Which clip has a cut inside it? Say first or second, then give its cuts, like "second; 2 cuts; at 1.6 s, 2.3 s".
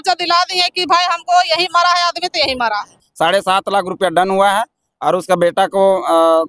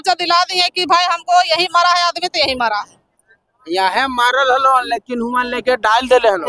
first; 1 cut; at 3.0 s